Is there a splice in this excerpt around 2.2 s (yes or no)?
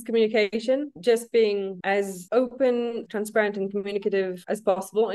no